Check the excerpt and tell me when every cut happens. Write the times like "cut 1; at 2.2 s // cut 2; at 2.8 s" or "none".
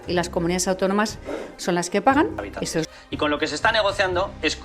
cut 1; at 2.9 s